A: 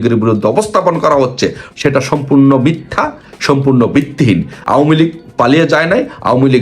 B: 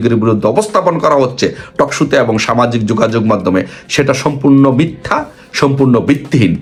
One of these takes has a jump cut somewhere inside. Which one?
A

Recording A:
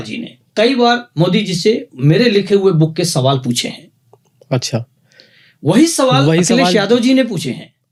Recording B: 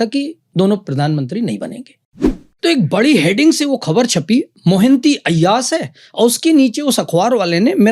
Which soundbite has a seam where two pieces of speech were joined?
B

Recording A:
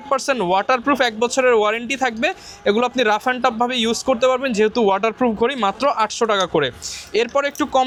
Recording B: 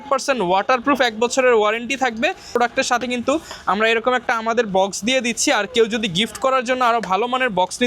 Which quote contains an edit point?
B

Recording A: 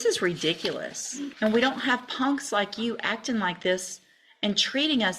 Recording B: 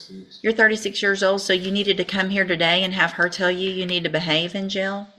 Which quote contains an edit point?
A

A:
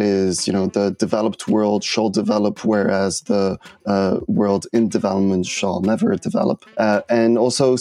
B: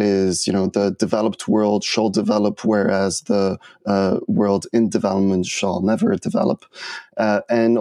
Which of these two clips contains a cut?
A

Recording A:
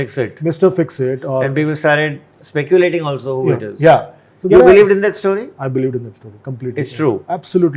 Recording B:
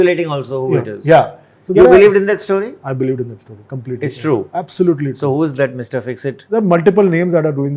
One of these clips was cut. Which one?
B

